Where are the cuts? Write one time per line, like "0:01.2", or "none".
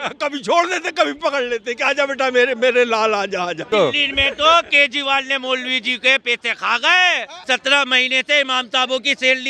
0:03.7
0:07.3